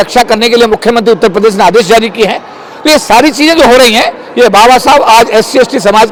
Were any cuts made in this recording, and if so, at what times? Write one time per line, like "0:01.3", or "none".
none